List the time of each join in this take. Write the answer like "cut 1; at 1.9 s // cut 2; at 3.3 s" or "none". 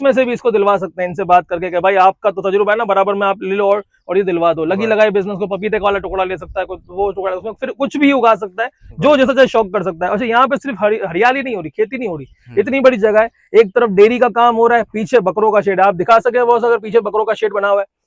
none